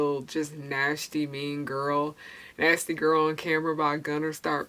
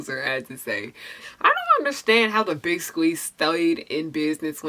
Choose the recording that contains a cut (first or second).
second